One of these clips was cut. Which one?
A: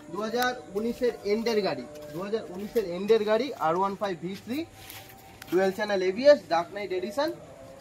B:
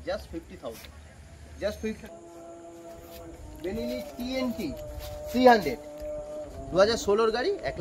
B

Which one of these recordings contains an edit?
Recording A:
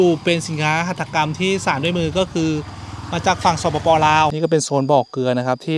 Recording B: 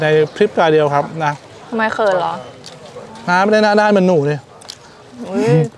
A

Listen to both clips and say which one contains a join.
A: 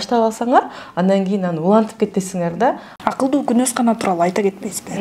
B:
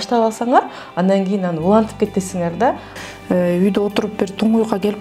B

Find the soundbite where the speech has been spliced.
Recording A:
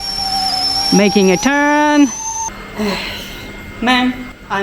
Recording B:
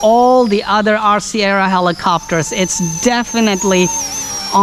A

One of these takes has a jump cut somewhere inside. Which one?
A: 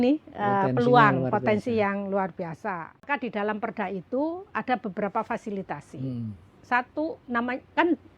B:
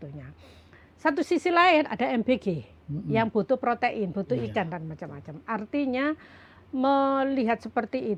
A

